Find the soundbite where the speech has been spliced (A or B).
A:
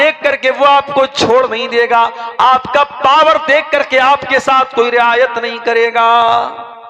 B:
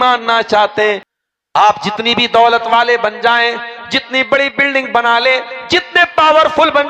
B